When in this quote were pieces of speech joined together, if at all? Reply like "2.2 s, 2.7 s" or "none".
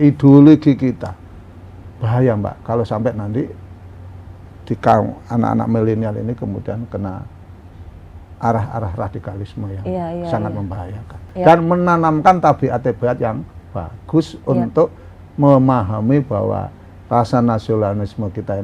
11.2 s